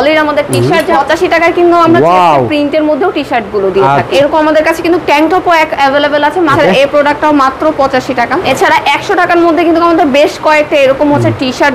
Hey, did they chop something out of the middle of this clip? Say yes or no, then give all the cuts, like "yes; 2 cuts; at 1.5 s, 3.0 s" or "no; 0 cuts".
yes; 4 cuts; at 1.0 s, 4.1 s, 6.5 s, 8.4 s